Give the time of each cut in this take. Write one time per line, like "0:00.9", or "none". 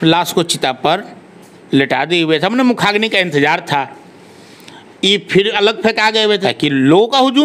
0:06.4